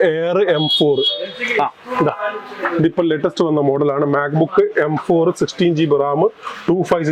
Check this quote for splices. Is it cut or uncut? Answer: uncut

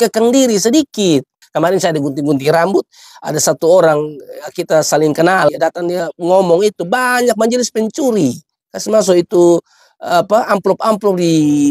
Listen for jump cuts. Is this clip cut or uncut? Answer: cut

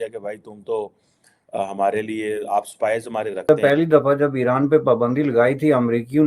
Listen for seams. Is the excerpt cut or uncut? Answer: cut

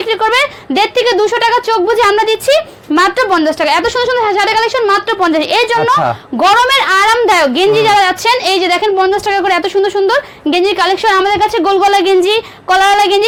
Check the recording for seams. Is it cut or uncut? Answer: uncut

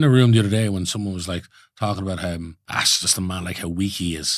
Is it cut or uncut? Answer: cut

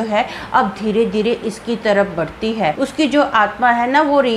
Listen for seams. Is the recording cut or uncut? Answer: cut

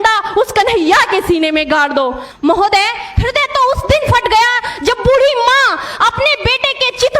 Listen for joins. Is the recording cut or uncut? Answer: cut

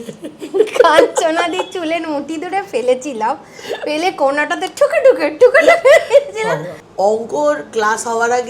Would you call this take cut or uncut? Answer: cut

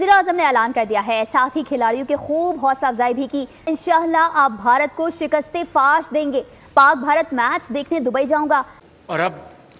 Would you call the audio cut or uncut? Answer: cut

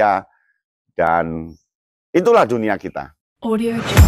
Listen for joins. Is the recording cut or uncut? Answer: cut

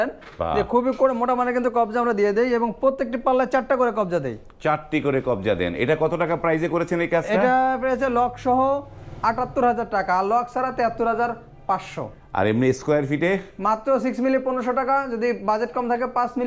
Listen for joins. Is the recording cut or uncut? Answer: uncut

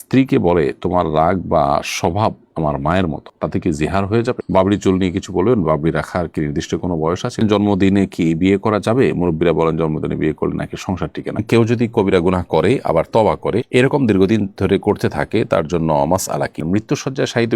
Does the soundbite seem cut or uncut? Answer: cut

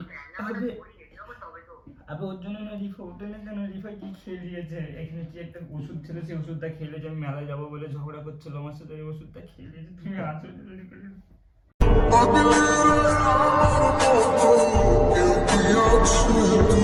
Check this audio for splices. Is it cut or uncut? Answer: uncut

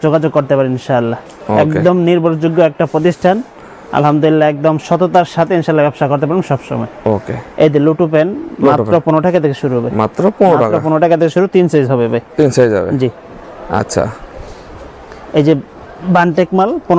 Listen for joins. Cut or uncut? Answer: uncut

